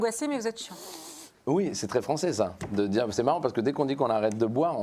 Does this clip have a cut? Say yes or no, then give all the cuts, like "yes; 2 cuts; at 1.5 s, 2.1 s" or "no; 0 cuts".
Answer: no; 0 cuts